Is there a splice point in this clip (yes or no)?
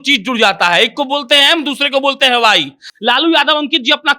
yes